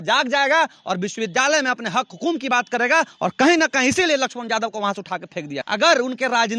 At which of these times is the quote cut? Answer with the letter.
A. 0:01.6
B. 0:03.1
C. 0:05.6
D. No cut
C